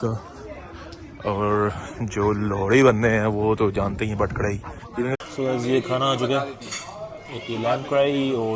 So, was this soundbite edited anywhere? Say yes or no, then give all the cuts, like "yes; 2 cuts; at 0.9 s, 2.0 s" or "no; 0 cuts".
yes; 1 cut; at 5.2 s